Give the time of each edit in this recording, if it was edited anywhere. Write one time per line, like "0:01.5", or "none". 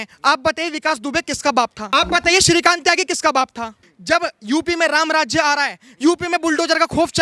0:01.8
0:03.9